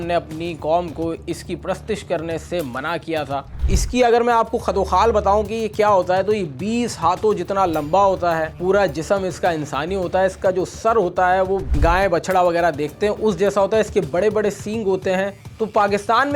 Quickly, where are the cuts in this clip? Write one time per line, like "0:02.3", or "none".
0:03.6
0:11.7
0:15.4